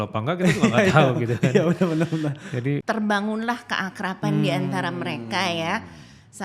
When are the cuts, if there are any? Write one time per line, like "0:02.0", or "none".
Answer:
0:02.8